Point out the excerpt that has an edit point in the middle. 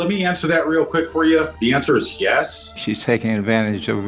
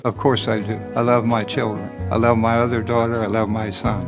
first; 2 cuts; at 1.5 s, 2.7 s

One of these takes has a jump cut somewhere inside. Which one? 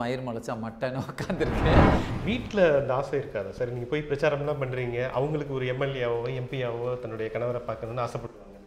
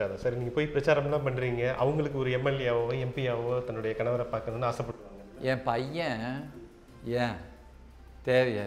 first; 1 cut; at 2.0 s

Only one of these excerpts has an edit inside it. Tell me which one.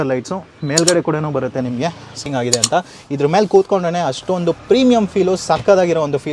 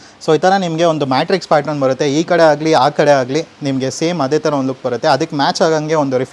first; 1 cut; at 2.2 s

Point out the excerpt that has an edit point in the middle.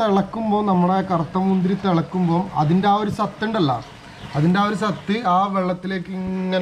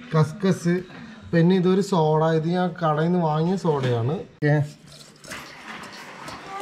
second; 1 cut; at 4.3 s

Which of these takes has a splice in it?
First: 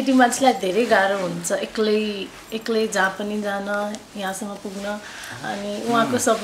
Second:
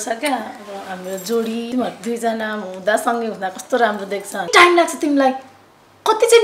second; 2 cuts; at 1.7 s, 4.5 s

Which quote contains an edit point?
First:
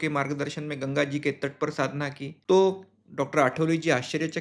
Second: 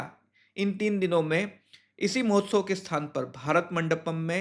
first; 1 cut; at 2.3 s

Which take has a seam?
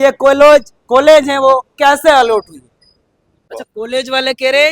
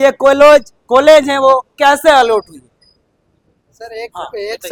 first; 1 cut; at 3.4 s

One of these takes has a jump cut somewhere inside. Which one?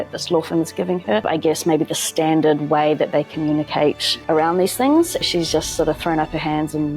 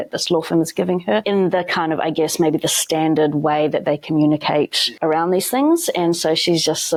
first; 2 cuts; at 1.2 s, 5.2 s

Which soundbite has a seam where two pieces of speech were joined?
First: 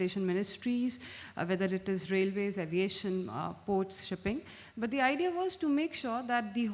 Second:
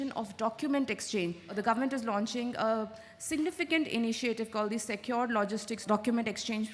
second; 2 cuts; at 1.5 s, 5.8 s

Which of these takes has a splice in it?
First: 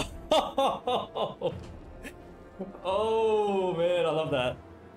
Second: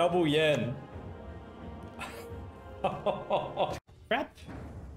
second; 1 cut; at 3.8 s

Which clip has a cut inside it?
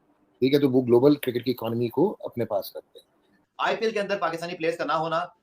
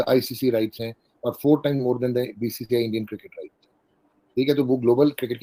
first; 1 cut; at 3.3 s

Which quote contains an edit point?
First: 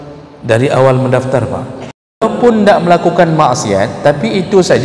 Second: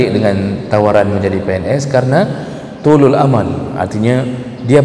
first; 1 cut; at 2.2 s

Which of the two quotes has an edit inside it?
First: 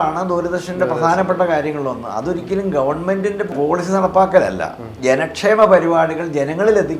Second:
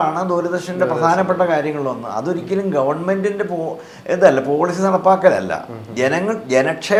first; 2 cuts; at 3.5 s, 4.9 s

